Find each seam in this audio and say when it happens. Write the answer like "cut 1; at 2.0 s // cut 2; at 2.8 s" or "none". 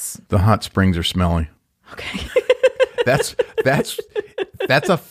none